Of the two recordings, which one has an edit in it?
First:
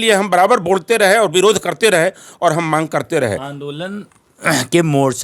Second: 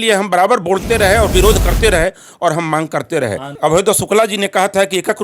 second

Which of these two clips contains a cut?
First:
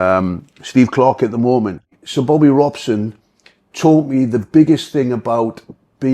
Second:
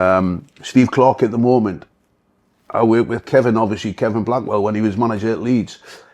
first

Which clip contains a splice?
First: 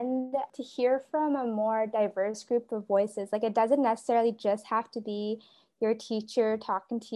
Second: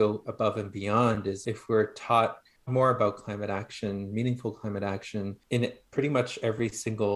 second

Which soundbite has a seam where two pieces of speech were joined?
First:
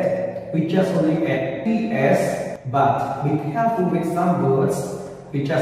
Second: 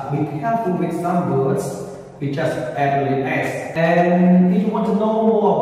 second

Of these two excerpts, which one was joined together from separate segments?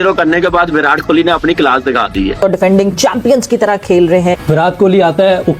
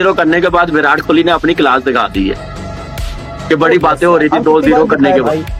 first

